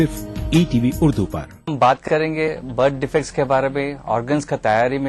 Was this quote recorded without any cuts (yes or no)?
no